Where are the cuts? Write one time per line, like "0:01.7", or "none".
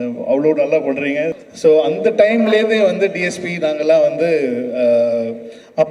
0:01.4